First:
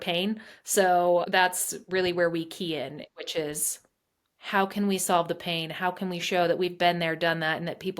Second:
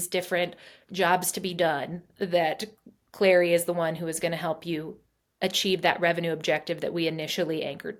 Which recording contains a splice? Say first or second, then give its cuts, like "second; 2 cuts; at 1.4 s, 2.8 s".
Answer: first; 1 cut; at 1.3 s